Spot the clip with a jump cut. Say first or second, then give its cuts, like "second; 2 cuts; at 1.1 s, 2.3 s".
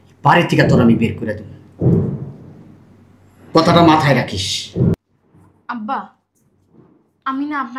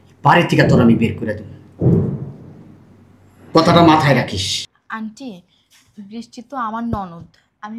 second; 1 cut; at 4.6 s